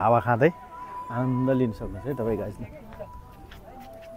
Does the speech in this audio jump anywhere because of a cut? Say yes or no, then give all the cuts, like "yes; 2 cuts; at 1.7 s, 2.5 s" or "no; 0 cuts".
no; 0 cuts